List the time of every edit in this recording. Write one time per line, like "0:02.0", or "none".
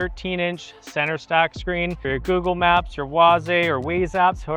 0:02.0